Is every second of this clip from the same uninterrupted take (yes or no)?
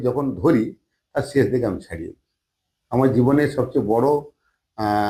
yes